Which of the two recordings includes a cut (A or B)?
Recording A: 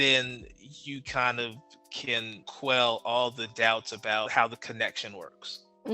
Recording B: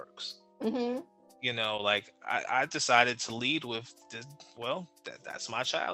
A